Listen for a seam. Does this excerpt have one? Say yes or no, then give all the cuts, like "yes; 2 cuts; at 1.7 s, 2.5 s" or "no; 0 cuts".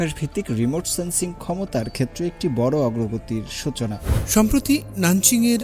yes; 1 cut; at 4.1 s